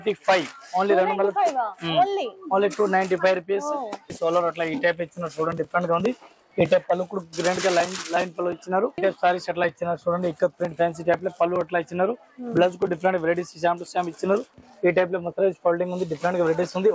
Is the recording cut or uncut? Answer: cut